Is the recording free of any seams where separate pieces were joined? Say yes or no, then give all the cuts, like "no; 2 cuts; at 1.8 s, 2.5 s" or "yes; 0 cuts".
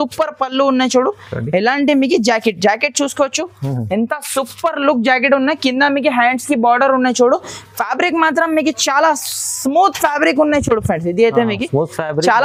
yes; 0 cuts